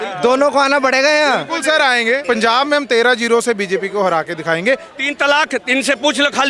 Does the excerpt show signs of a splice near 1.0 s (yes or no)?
no